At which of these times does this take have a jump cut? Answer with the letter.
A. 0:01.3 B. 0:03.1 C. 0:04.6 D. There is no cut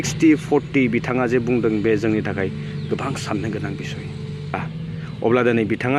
C